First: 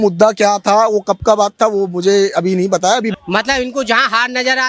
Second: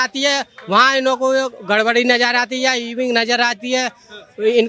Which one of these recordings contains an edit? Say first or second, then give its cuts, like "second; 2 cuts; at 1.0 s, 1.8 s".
first; 1 cut; at 3.1 s